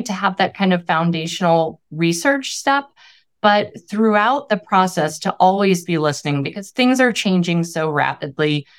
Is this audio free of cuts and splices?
yes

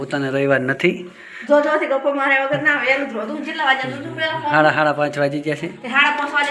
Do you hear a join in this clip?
no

